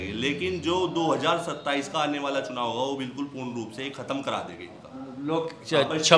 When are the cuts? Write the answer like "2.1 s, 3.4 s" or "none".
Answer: none